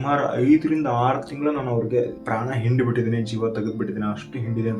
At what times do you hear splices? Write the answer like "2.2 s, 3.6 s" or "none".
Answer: none